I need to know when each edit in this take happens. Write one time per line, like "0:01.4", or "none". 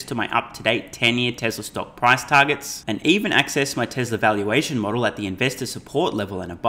none